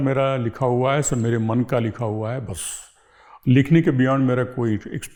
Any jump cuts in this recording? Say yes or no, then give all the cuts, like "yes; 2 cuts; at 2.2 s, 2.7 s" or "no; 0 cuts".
no; 0 cuts